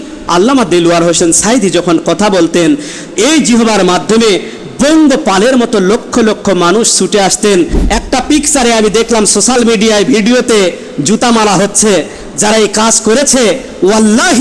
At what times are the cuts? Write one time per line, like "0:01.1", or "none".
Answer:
0:07.9